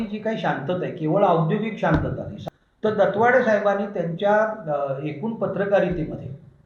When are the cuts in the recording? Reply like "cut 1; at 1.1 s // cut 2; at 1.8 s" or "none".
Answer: cut 1; at 2.3 s